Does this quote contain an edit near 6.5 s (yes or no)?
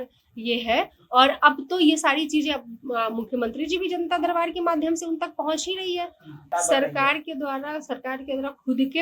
yes